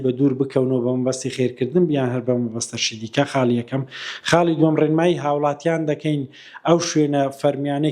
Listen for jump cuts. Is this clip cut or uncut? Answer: uncut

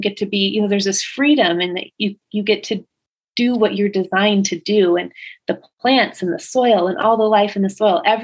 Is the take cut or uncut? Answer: uncut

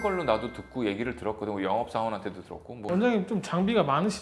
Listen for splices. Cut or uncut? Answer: cut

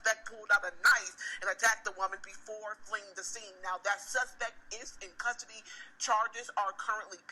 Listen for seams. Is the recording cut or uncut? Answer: uncut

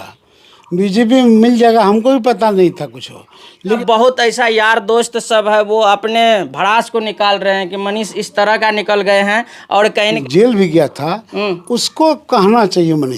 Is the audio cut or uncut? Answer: cut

